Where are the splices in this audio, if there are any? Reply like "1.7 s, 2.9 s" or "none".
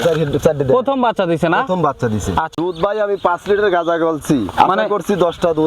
2.5 s